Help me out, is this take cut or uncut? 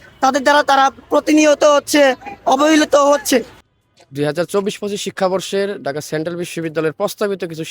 cut